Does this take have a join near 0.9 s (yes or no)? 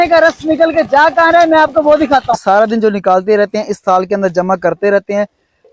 no